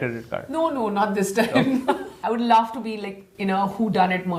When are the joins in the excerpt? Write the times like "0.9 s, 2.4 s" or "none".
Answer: 2.1 s